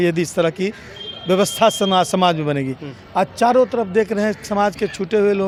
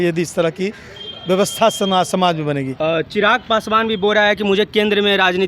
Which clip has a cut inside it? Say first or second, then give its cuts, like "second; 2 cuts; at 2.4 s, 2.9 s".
second; 1 cut; at 2.7 s